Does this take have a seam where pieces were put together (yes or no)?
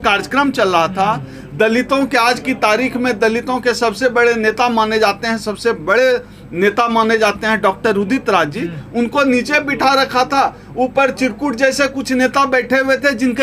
no